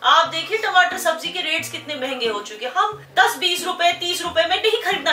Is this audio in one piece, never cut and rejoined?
no; 1 cut; at 3.0 s

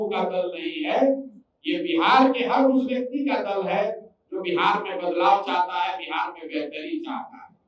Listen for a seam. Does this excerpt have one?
no; 0 cuts

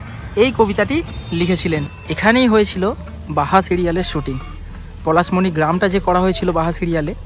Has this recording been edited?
yes; 1 cut; at 1.9 s

